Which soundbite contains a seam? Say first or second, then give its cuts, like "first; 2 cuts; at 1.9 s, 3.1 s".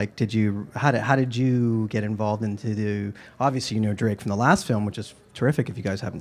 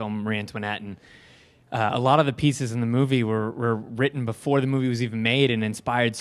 second; 1 cut; at 1.7 s